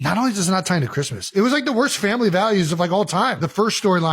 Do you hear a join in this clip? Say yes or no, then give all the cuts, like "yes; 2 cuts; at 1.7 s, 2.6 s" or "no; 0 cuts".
yes; 2 cuts; at 1.3 s, 3.4 s